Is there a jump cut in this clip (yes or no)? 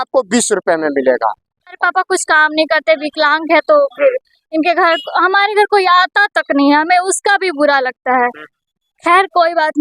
yes